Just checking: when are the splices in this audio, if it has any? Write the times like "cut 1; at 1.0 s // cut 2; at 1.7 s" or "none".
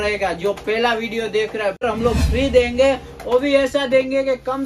cut 1; at 1.8 s

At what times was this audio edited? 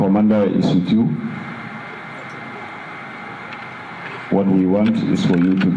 none

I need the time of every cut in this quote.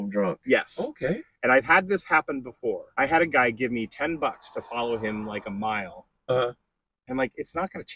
cut 1; at 2.9 s

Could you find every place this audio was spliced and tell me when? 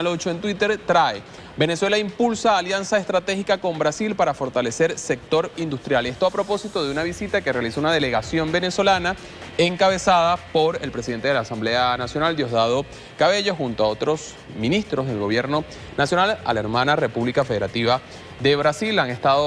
cut 1; at 6.8 s

